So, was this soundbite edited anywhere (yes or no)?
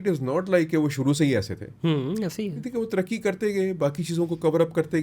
no